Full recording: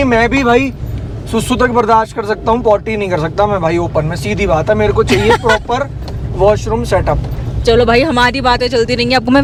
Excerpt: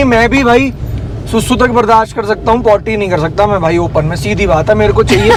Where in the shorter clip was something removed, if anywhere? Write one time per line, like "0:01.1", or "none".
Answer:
none